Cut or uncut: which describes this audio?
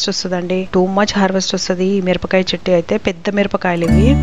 uncut